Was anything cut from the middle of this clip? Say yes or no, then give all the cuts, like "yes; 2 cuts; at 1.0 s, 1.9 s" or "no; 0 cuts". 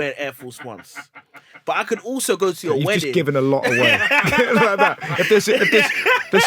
no; 0 cuts